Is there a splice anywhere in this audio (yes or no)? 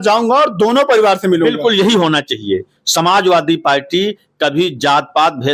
no